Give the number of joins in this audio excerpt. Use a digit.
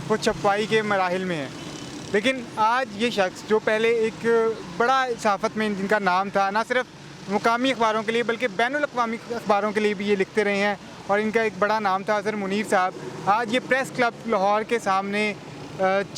0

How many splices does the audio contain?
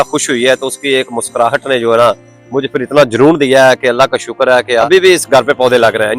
1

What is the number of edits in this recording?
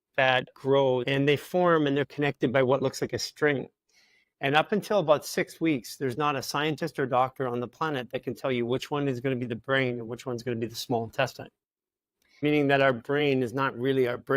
2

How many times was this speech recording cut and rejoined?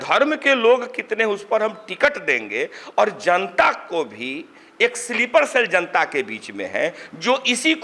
0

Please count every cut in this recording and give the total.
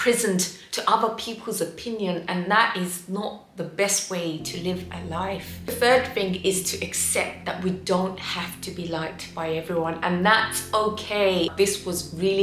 0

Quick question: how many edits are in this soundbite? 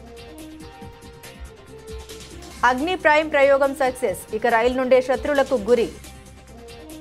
2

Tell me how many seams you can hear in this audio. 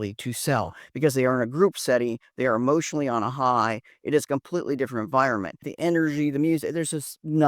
1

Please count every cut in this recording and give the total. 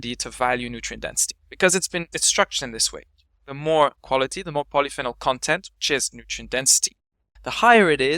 1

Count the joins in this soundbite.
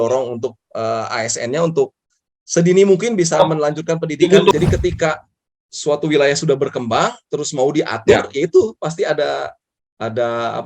1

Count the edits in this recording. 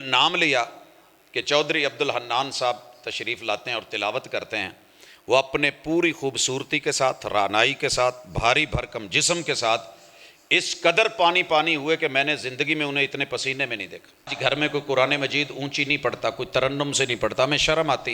1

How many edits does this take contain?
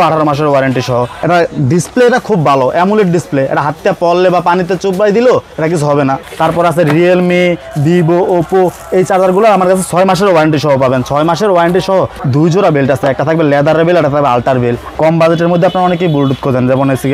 4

